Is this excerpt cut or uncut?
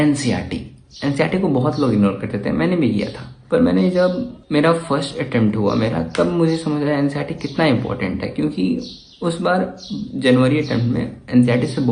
uncut